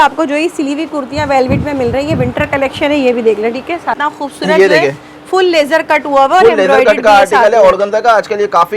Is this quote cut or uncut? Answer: cut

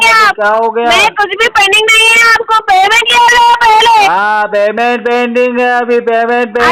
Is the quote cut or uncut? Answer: uncut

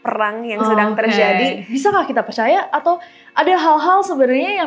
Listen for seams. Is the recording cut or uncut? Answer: cut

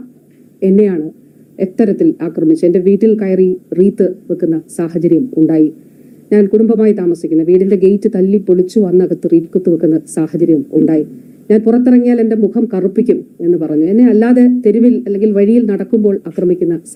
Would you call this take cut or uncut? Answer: uncut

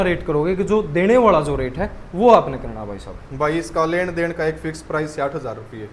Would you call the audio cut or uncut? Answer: uncut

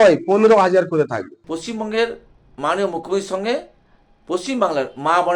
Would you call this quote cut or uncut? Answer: cut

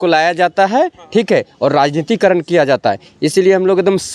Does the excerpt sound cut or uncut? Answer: uncut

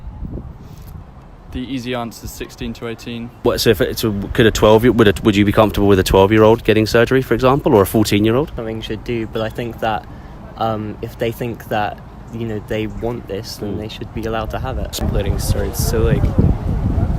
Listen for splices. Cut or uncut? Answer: cut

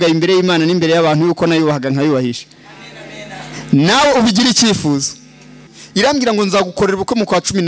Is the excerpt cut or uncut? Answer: cut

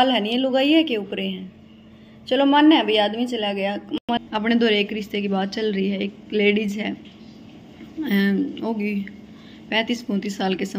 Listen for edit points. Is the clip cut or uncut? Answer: cut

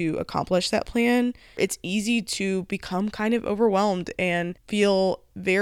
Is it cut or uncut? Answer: cut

